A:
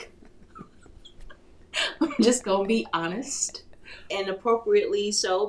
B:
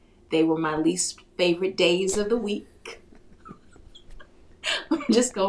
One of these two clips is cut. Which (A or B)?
A